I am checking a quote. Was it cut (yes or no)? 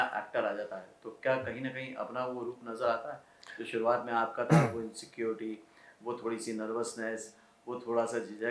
no